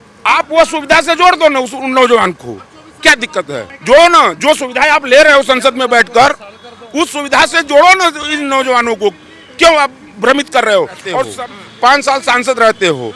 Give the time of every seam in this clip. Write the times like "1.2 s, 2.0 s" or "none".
3.7 s, 11.3 s